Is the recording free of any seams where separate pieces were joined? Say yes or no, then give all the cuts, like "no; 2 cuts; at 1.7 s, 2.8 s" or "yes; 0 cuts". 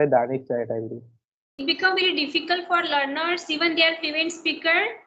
no; 1 cut; at 1.5 s